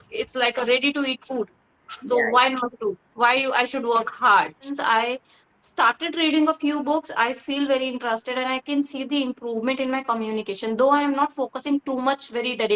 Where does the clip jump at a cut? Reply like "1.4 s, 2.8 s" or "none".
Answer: 4.8 s